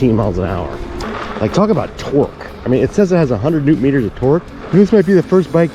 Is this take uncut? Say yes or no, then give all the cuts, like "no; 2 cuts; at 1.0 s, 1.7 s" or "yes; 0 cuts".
no; 2 cuts; at 1.0 s, 4.6 s